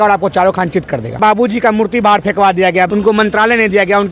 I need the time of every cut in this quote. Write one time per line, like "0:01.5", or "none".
0:01.2
0:02.9